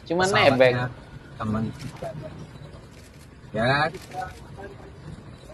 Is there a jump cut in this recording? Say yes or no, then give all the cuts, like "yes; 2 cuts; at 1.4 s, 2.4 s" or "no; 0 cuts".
no; 0 cuts